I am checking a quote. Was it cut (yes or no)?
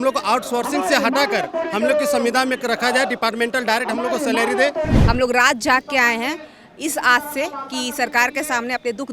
yes